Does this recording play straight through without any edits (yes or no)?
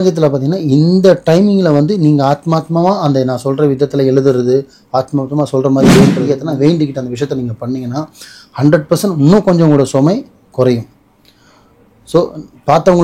no